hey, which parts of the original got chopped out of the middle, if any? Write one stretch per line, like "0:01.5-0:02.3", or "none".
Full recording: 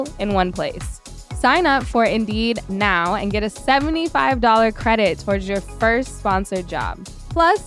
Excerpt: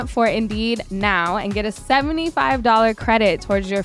none